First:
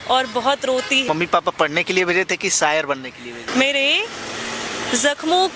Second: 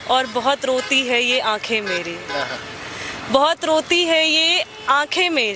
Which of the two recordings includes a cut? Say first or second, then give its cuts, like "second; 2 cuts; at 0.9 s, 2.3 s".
first; 2 cuts; at 1.1 s, 3.4 s